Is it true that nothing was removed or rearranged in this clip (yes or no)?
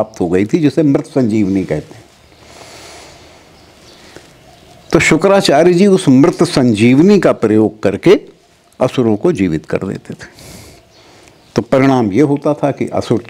yes